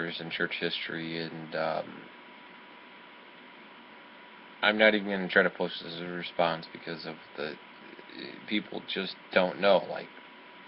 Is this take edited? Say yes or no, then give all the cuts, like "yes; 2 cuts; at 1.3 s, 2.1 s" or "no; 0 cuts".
yes; 1 cut; at 5.4 s